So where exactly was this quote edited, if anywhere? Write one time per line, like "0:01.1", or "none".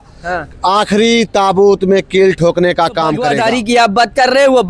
0:03.2